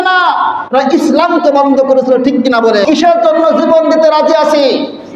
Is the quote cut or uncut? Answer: cut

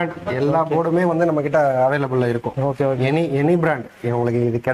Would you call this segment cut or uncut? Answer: uncut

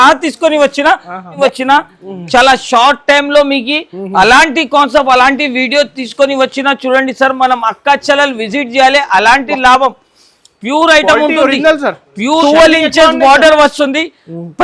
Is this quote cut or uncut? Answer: cut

